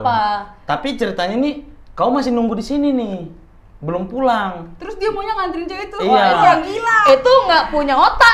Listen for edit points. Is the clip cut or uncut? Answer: uncut